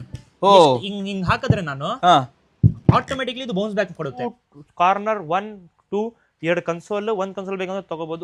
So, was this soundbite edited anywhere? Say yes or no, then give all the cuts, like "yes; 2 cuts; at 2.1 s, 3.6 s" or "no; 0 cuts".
yes; 1 cut; at 4.2 s